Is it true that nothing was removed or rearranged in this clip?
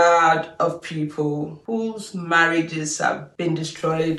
yes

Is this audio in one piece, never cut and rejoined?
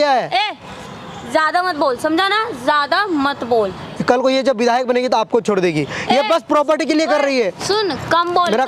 no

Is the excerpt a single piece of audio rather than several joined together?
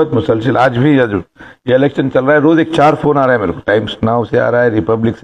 yes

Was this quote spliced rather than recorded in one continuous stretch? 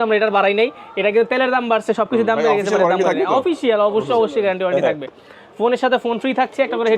no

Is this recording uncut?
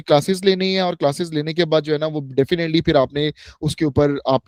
yes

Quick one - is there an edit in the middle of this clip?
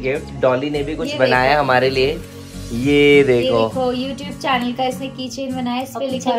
no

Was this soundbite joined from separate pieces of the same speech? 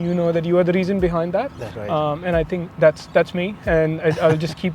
no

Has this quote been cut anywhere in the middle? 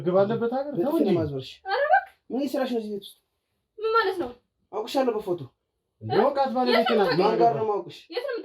no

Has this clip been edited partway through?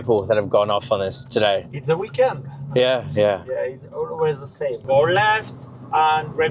no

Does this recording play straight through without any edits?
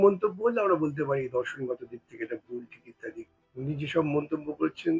no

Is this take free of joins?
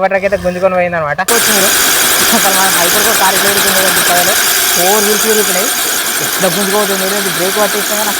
no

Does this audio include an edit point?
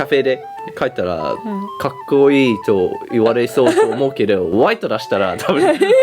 no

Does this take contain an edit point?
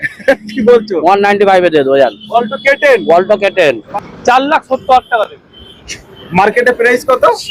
yes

